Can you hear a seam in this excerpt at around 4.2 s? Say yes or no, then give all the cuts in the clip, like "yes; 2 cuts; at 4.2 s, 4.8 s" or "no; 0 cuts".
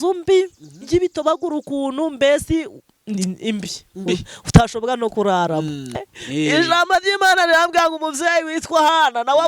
no; 1 cut; at 6.0 s